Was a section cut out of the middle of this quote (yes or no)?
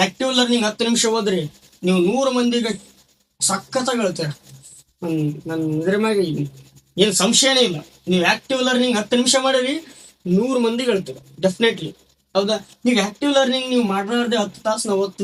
no